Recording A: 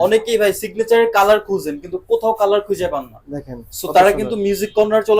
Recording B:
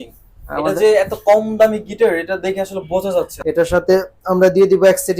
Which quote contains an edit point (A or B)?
B